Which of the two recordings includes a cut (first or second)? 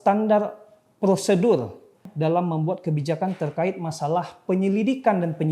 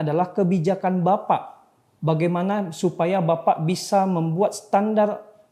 first